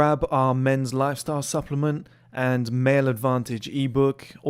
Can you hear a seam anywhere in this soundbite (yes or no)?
no